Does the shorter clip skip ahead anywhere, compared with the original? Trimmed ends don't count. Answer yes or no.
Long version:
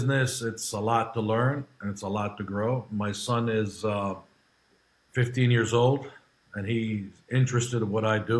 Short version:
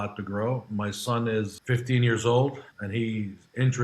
yes